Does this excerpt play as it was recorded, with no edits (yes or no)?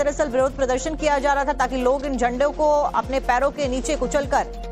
yes